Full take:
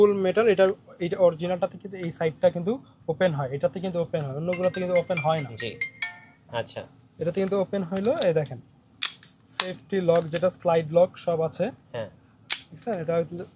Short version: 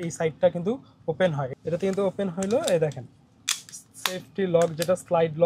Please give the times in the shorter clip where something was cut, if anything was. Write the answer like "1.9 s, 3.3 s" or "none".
1.5 s